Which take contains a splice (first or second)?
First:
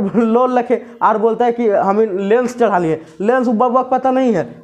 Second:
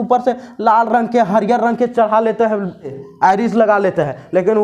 second